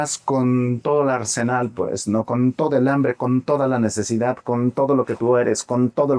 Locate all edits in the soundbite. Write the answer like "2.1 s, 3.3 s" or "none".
none